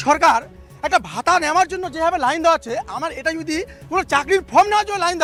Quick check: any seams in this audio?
no; 0 cuts

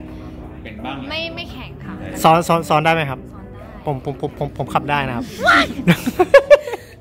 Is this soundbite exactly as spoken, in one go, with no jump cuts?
yes; 0 cuts

